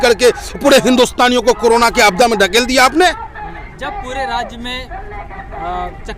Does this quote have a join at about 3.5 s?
no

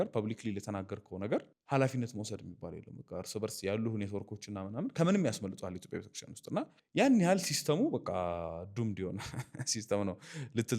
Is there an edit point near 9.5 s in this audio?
no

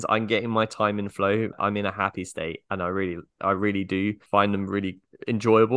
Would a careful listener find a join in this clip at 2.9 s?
no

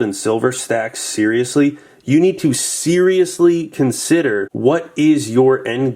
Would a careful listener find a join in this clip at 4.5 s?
yes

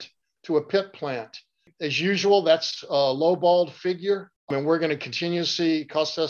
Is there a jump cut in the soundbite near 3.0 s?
no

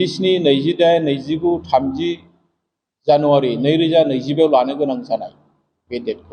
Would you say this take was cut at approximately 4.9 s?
no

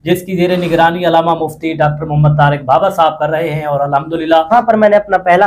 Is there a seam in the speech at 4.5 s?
yes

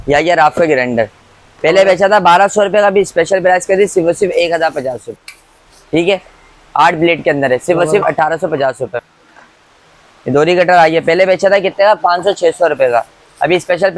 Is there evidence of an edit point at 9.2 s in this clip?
yes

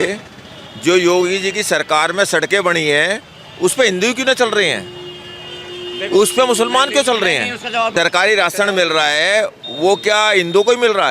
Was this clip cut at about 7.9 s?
yes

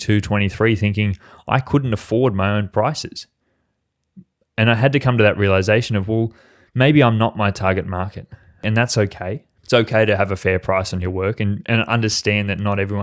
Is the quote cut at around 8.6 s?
yes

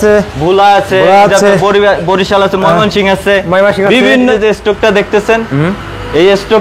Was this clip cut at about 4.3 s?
yes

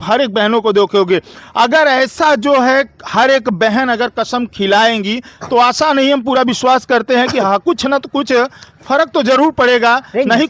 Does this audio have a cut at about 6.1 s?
no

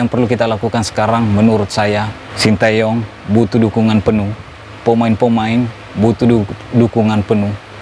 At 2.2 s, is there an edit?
yes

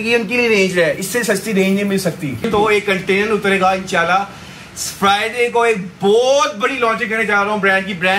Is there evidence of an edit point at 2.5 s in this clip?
yes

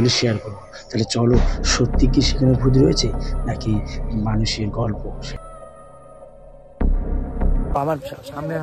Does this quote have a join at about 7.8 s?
yes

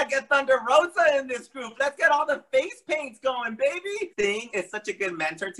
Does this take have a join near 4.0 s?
yes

